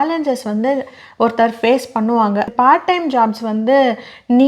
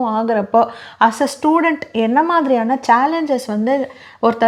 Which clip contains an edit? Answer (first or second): first